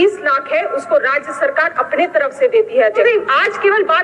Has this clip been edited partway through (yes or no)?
yes